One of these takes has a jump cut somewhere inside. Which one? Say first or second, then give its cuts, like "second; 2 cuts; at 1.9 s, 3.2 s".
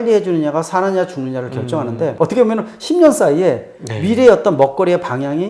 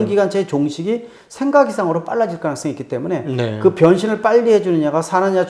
first; 1 cut; at 2.1 s